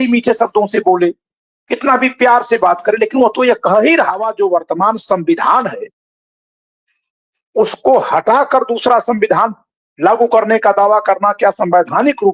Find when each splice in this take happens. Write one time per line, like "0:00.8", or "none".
0:04.3